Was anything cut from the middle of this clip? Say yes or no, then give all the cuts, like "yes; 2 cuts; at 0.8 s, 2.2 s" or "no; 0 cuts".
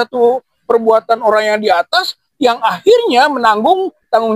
no; 0 cuts